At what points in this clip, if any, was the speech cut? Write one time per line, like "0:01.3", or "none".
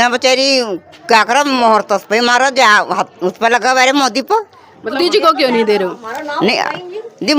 0:05.0

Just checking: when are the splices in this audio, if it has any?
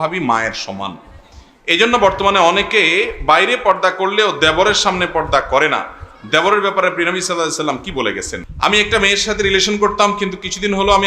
0:08.4

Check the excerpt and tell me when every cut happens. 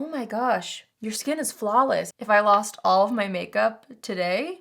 0:02.1

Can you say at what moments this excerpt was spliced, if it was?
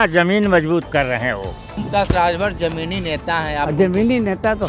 0:01.8

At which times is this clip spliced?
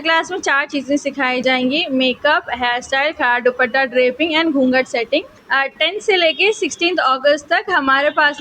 0:05.4

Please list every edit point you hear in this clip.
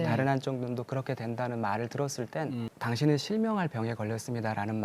0:02.7

